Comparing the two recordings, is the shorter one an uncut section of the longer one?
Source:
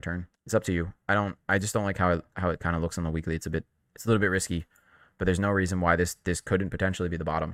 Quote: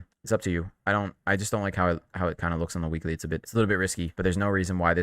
no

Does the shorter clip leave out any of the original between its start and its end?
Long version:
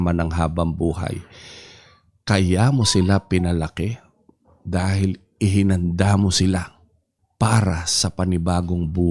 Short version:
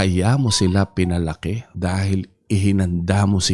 yes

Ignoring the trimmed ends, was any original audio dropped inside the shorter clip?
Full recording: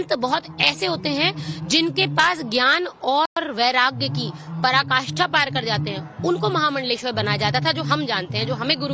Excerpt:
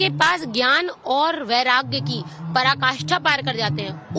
yes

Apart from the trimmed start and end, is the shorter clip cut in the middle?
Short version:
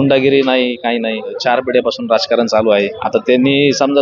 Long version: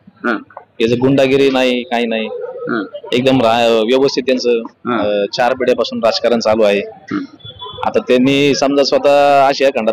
yes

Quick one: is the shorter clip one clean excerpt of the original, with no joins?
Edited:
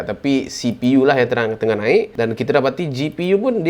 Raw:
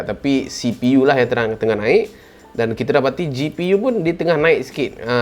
no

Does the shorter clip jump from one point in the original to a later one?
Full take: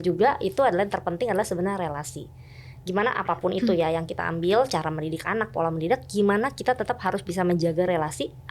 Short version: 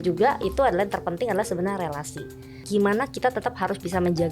yes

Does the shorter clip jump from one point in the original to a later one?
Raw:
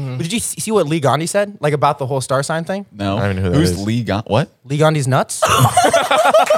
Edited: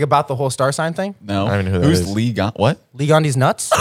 no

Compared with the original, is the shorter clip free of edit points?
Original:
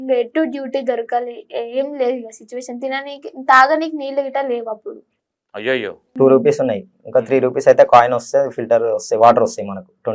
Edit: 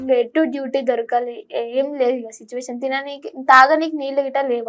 yes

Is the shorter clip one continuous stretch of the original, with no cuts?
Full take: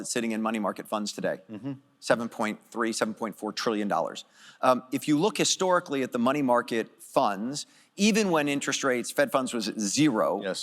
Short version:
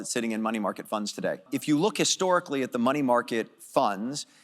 no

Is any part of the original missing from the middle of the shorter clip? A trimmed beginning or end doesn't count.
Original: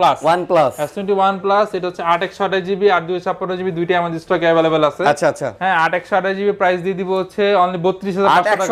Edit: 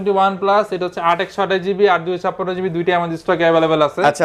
no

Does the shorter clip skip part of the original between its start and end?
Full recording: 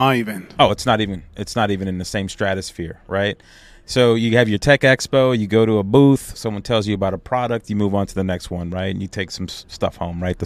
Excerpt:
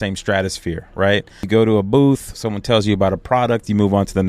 yes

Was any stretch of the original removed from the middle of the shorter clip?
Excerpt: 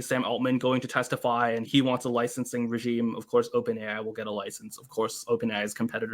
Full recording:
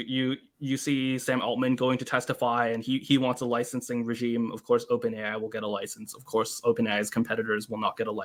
yes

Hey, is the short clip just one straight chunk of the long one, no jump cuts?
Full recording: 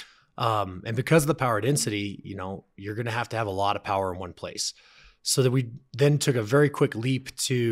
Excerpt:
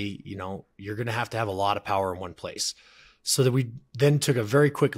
yes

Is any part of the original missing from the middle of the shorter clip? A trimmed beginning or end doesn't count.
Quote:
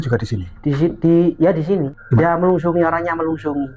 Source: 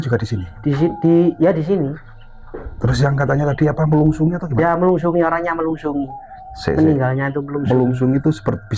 yes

